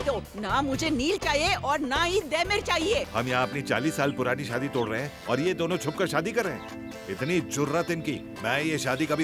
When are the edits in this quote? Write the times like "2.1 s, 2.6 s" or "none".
3.1 s